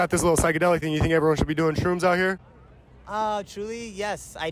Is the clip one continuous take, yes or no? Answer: yes